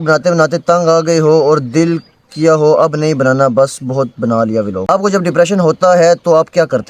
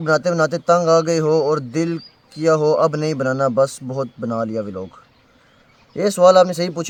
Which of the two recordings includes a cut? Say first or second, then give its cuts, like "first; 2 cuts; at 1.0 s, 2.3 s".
first; 1 cut; at 4.8 s